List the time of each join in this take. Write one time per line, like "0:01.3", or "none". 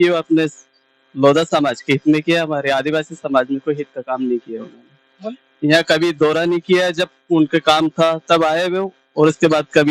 none